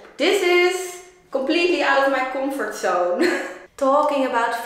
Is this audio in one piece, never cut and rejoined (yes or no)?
no